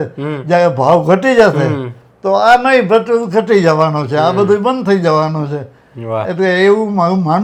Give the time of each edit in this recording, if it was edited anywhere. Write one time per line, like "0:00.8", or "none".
none

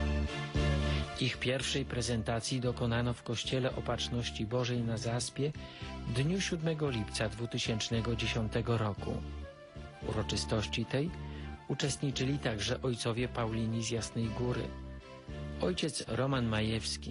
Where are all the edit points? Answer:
none

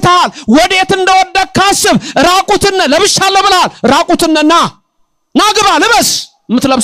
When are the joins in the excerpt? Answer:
none

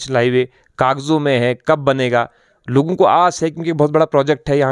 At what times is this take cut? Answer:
none

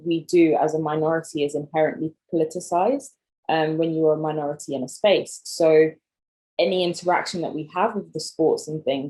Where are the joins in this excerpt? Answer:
0:02.2

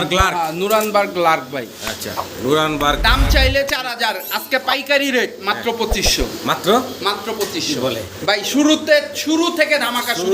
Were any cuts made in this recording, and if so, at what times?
none

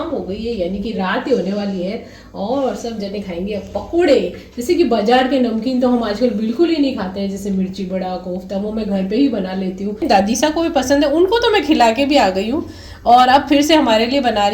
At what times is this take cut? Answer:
0:10.0

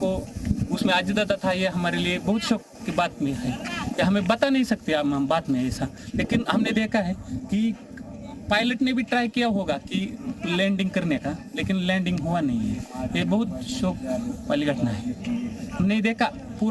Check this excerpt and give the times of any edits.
none

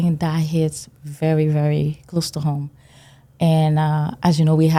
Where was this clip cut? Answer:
none

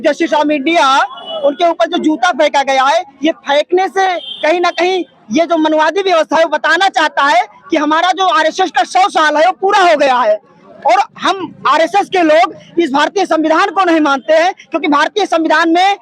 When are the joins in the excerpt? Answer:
none

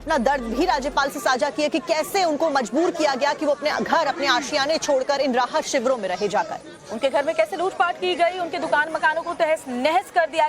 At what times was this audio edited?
0:01.3

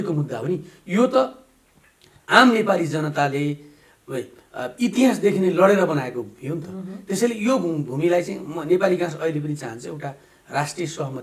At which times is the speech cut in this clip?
none

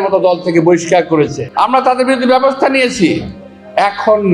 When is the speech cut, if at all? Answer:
0:01.4

